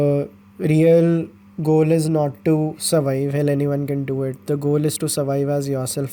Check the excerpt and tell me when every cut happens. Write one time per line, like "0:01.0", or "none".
none